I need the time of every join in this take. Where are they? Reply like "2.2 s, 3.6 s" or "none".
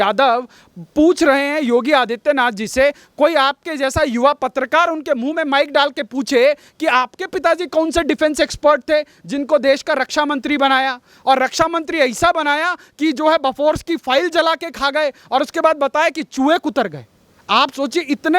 none